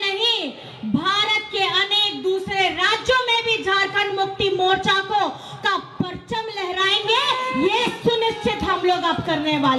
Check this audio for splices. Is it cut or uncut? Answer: uncut